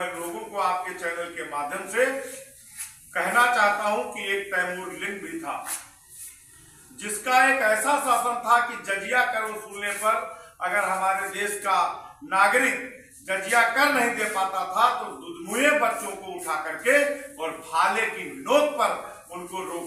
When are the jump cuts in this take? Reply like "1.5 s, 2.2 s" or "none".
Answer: none